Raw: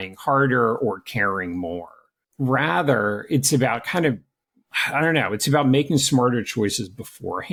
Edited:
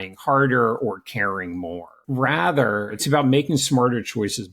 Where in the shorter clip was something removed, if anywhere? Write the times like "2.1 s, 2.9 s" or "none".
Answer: 1.9 s, 2.9 s